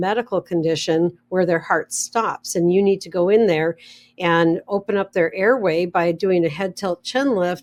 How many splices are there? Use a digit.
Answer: 0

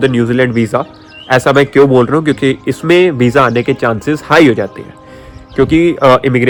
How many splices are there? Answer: 0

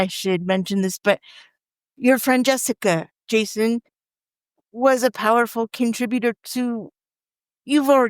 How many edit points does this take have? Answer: 1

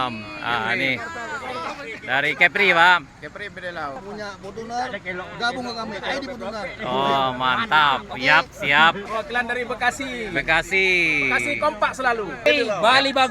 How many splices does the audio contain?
3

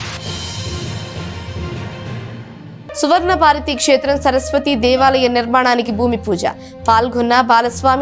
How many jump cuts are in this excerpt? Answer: 1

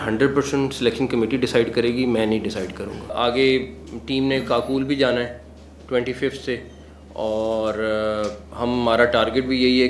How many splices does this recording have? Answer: 1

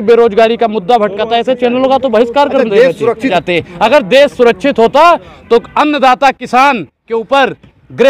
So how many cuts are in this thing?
1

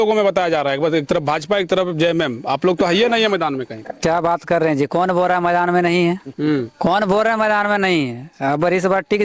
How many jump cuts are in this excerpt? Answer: 0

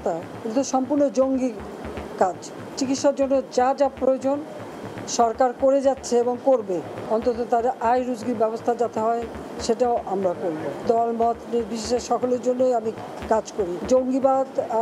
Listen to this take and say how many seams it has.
4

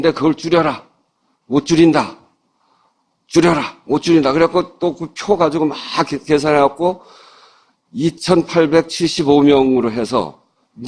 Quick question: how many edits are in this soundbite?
1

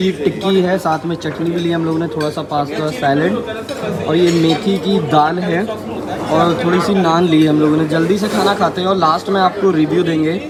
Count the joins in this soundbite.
0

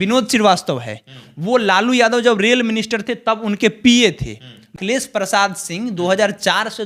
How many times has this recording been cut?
1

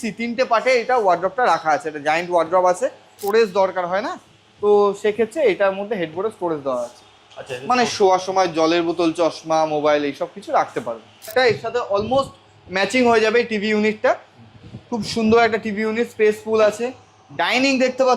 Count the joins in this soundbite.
2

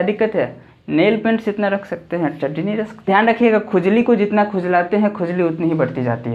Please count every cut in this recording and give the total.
1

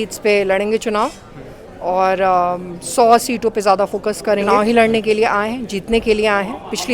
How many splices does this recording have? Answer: 1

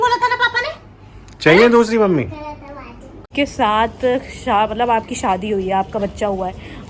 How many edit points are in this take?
1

